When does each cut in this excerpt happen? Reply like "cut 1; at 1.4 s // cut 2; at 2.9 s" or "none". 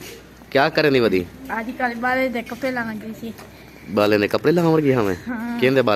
none